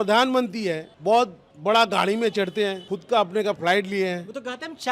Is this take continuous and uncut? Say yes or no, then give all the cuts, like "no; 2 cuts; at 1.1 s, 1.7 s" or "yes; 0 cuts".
no; 3 cuts; at 0.9 s, 1.5 s, 2.9 s